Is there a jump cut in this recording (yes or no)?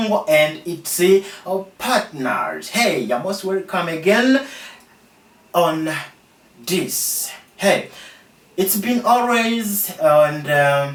no